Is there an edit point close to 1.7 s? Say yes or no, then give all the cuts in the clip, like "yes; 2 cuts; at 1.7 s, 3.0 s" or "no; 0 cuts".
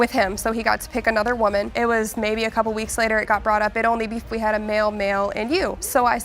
yes; 1 cut; at 1.7 s